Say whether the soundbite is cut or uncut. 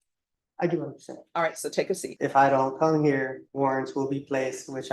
cut